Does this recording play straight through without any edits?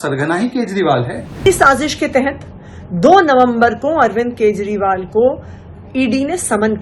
no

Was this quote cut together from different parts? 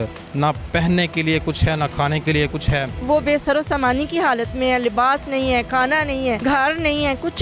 yes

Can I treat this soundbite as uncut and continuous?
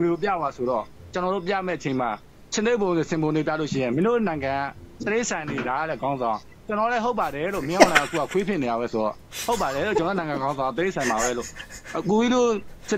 no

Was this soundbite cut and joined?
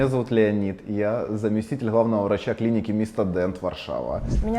no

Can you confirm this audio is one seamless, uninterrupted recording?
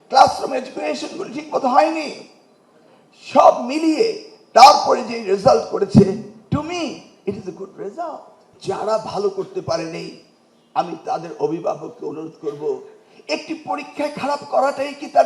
no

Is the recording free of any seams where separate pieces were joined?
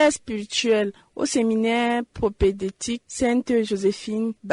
yes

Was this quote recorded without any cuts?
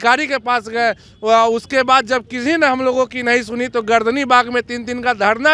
yes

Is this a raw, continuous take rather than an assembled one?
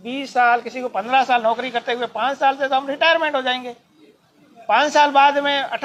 yes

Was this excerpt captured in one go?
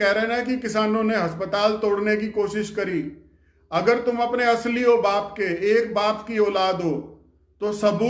yes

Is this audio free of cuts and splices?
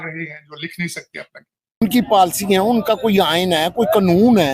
no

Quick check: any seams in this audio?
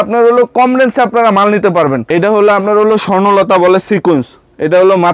yes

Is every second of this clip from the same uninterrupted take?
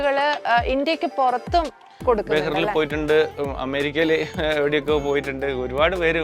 yes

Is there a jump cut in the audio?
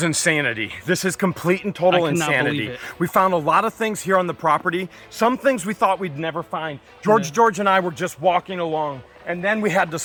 no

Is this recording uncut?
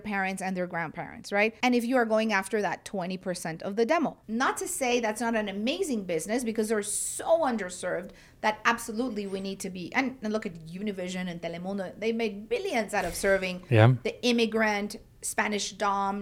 no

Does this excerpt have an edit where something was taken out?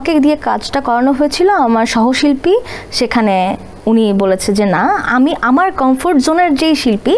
no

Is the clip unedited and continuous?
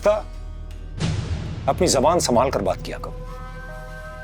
yes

